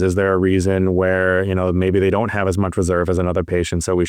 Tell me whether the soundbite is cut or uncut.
uncut